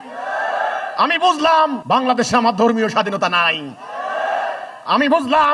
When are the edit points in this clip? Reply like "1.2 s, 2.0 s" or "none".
1.8 s